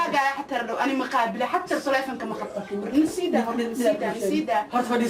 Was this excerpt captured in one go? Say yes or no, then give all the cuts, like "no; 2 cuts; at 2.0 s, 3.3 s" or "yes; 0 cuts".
yes; 0 cuts